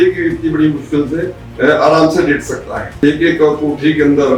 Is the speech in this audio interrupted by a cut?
yes; 2 cuts; at 1.4 s, 3.0 s

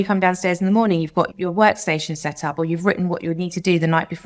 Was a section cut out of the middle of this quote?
yes; 1 cut; at 1.3 s

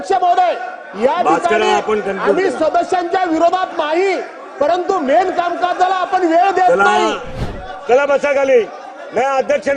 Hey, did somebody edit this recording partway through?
yes; 1 cut; at 7.4 s

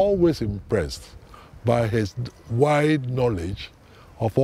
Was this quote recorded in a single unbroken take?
yes; 0 cuts

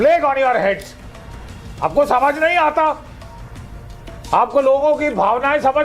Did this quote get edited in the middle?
no; 0 cuts

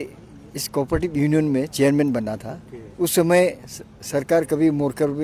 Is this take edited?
no; 0 cuts

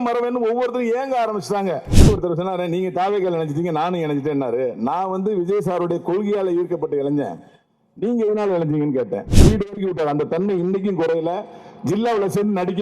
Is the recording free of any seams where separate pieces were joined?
no; 2 cuts; at 2.1 s, 9.4 s

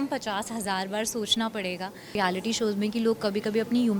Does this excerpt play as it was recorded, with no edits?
no; 1 cut; at 2.2 s

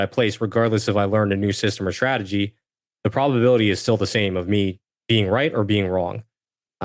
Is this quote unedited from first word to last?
no; 1 cut; at 4.9 s

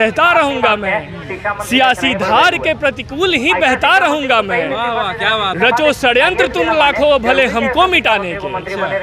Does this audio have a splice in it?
no; 0 cuts

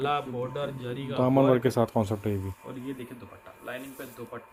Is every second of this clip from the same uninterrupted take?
yes; 0 cuts

